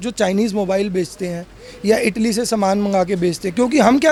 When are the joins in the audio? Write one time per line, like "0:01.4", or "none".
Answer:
none